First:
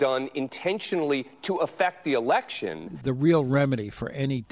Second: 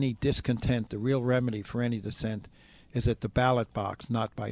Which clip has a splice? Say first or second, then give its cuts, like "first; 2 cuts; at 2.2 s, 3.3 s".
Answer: first; 1 cut; at 2.9 s